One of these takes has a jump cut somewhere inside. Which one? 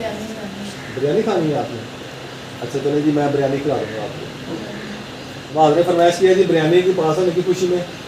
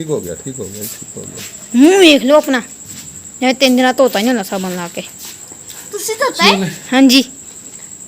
first; 1 cut; at 5.5 s

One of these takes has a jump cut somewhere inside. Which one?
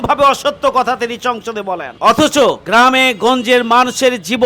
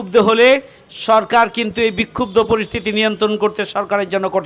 first; 2 cuts; at 1.9 s, 2.6 s

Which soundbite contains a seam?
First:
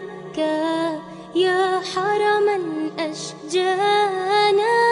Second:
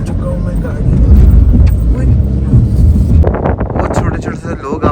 second; 1 cut; at 3.2 s

